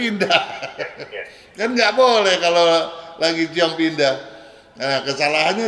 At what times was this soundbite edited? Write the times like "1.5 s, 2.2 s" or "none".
none